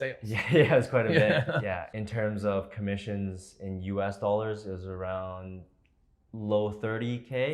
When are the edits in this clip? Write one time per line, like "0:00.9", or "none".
0:01.9